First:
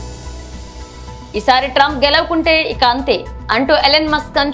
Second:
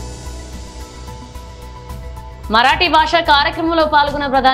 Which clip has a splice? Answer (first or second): first